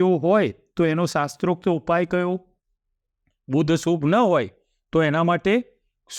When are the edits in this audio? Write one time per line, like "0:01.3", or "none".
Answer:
none